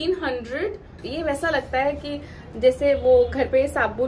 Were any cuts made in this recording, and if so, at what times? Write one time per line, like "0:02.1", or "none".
0:01.0